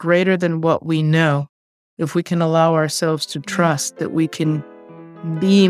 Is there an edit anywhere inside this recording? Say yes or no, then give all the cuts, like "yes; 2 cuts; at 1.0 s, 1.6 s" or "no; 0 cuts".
no; 0 cuts